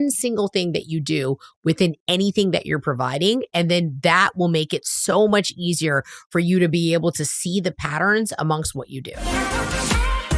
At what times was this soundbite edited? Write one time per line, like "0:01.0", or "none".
0:09.2